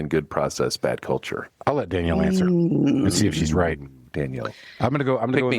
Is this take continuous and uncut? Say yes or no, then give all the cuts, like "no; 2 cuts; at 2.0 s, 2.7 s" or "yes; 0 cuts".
no; 1 cut; at 1.4 s